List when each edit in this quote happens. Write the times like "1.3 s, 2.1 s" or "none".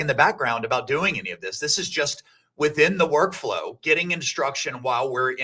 none